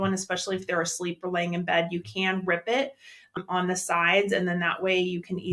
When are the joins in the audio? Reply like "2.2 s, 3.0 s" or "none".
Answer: 3.4 s